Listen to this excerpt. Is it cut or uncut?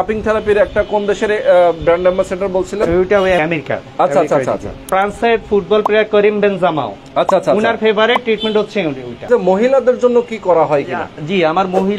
cut